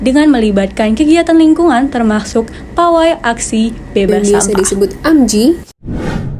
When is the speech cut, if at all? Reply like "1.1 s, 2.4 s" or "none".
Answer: 4.1 s, 5.6 s